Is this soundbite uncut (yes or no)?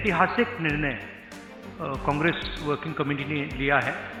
yes